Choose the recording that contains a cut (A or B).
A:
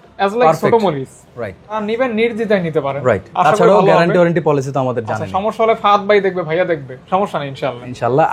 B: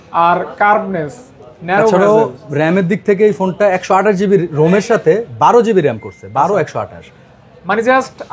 A